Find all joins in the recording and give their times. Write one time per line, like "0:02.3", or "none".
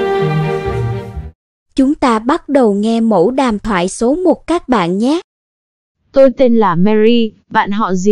0:01.1